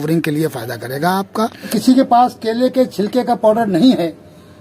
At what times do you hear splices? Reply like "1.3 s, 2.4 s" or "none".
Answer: 1.7 s